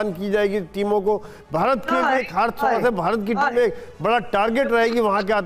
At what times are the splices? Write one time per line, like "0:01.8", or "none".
none